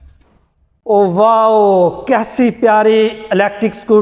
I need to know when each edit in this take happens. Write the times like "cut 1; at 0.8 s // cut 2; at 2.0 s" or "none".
none